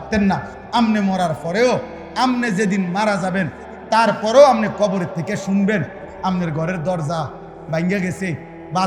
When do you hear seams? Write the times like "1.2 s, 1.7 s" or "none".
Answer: none